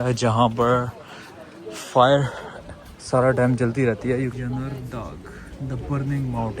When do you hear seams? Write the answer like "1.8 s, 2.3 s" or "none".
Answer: 4.3 s